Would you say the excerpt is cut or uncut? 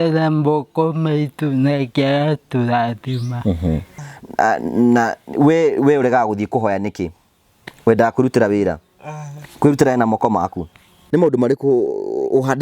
cut